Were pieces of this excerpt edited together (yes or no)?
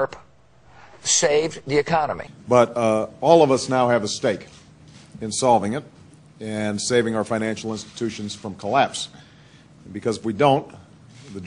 yes